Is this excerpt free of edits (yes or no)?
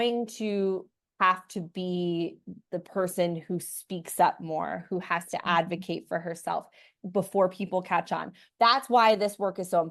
no